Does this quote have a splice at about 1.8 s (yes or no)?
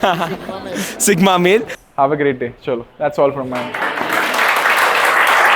yes